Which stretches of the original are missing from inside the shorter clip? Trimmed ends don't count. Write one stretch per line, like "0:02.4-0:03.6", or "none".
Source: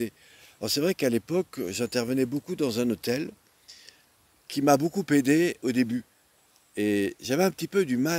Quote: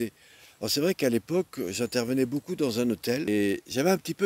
0:03.2-0:06.8